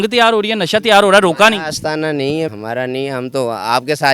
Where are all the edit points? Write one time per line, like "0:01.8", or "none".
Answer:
0:02.5